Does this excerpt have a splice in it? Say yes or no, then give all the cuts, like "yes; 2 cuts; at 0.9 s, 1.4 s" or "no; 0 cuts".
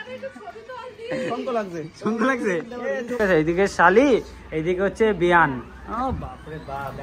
yes; 1 cut; at 3.2 s